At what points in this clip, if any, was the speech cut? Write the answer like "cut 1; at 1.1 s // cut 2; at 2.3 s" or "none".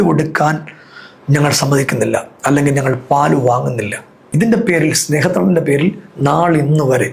cut 1; at 4.2 s